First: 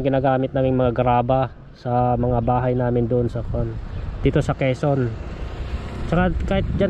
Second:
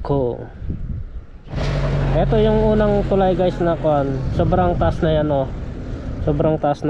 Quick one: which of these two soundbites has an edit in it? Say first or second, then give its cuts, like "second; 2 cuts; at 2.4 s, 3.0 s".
second; 1 cut; at 1.6 s